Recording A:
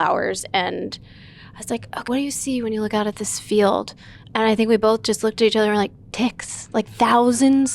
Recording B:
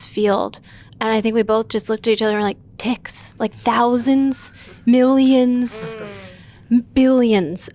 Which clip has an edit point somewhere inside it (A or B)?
A